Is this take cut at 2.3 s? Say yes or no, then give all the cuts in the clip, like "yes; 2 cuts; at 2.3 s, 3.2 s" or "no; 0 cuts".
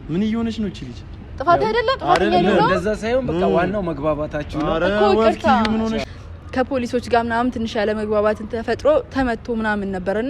no; 1 cut; at 6.1 s